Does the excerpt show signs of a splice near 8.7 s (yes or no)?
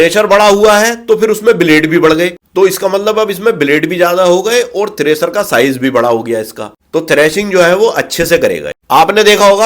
yes